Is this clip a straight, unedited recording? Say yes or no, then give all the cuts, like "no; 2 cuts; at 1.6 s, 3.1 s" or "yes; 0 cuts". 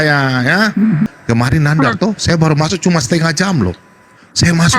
no; 1 cut; at 1.1 s